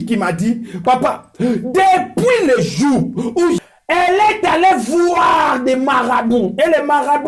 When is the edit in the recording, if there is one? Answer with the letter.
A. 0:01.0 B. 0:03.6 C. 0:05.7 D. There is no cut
B